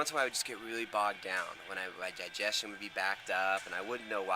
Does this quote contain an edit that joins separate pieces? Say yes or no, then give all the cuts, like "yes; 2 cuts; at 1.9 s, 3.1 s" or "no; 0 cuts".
no; 0 cuts